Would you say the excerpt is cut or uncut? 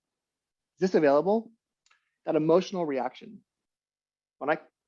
uncut